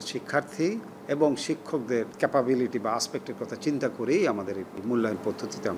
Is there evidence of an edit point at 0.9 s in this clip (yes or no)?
yes